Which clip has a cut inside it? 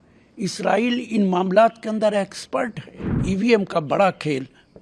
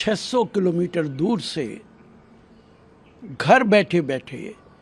first; 1 cut; at 3.2 s

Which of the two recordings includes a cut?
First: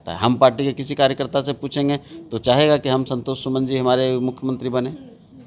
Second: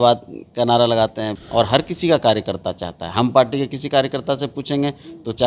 second; 1 cut; at 1.3 s

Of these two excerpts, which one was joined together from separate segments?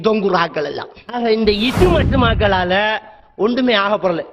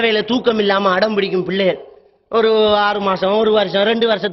first; 1 cut; at 1.0 s

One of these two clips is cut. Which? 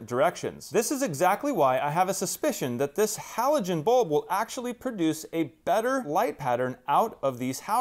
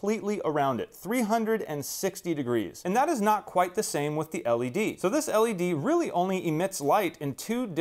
second; 1 cut; at 4.9 s

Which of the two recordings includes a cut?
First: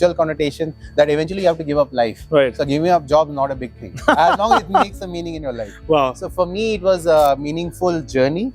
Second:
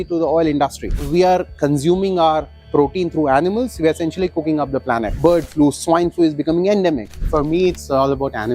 second; 3 cuts; at 0.9 s, 5.1 s, 7.2 s

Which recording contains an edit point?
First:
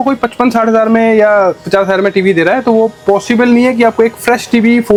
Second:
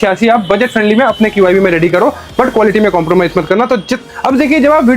second; 1 cut; at 3.9 s

